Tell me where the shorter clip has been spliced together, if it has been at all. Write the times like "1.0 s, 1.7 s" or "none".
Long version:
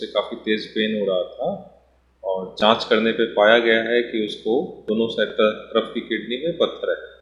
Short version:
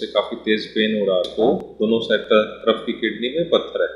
1.3 s